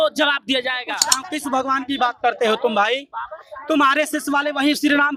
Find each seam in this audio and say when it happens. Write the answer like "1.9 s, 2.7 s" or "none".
1.0 s